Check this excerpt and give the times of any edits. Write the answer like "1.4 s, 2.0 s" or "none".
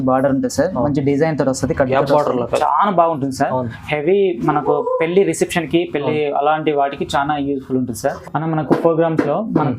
8.2 s